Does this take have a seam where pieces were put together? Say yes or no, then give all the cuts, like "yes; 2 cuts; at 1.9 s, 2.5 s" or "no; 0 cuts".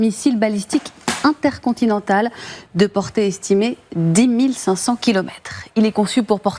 no; 0 cuts